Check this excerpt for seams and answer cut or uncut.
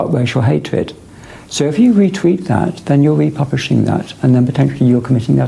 uncut